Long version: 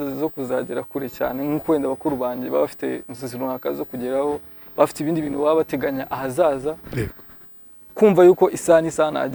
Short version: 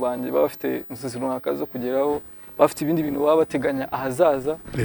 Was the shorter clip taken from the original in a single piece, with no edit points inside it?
yes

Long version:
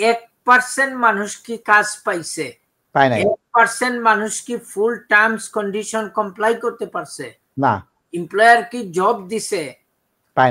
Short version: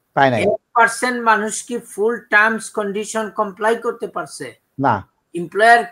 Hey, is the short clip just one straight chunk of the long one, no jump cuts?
yes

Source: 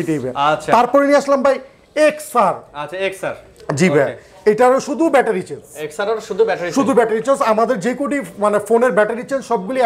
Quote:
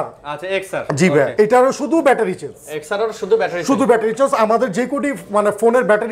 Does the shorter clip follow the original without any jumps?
no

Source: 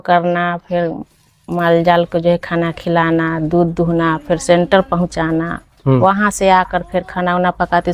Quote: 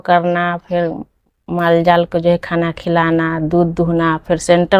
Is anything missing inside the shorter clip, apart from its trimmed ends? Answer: no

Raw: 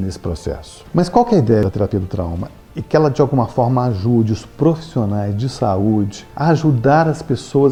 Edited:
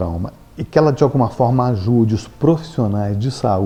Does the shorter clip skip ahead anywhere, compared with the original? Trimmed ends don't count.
no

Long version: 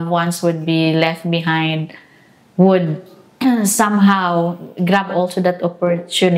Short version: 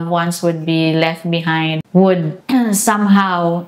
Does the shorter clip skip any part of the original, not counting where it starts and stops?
yes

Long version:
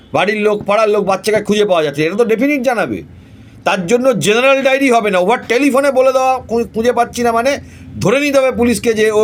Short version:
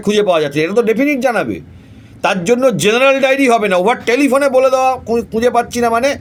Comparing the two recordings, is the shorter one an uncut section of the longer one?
yes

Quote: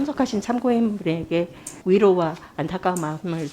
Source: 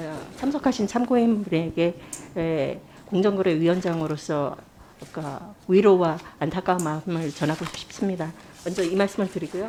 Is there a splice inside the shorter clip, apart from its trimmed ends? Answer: yes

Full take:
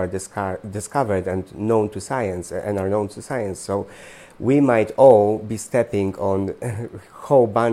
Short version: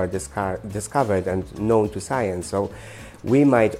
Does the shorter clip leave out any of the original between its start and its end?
yes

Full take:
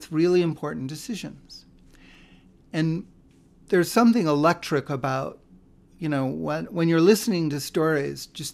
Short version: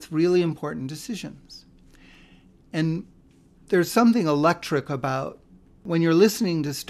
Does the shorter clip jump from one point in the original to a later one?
yes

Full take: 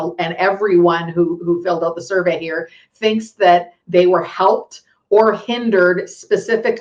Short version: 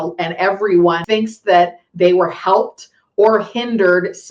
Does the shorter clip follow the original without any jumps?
no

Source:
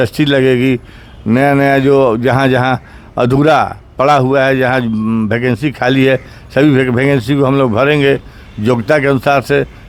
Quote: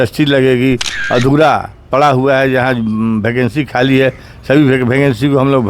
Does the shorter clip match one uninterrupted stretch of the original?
no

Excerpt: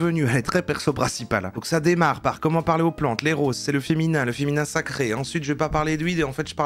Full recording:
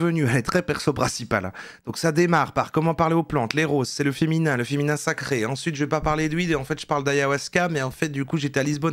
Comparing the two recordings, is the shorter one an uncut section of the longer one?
no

